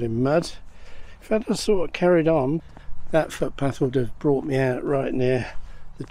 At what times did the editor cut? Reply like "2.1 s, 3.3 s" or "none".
2.6 s